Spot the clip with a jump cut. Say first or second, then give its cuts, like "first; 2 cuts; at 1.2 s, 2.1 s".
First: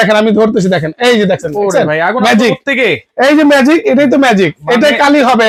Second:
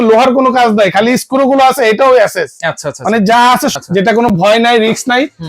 second; 1 cut; at 3.7 s